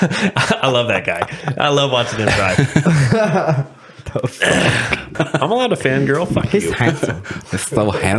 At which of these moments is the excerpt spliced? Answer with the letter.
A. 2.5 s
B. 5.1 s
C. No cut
B